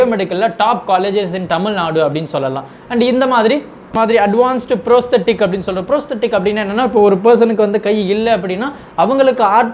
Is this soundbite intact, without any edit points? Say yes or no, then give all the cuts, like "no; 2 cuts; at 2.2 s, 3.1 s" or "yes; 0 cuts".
no; 1 cut; at 3.8 s